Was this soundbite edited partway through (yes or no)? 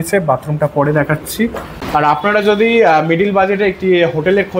yes